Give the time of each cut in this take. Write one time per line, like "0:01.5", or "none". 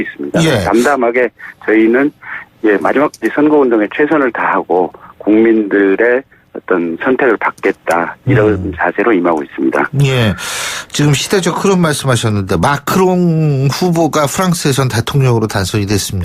0:03.6